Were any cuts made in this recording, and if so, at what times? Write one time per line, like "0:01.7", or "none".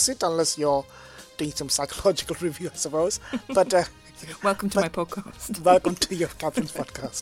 none